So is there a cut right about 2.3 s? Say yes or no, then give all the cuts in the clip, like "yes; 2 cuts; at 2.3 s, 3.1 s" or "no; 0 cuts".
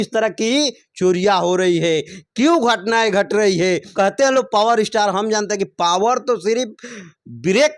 no; 1 cut; at 3.9 s